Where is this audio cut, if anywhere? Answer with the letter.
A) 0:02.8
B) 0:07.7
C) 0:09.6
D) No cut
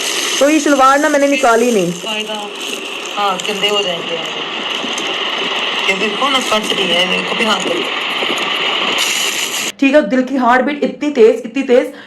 C